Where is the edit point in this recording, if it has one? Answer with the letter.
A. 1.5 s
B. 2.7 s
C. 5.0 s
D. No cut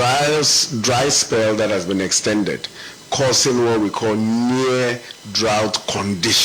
D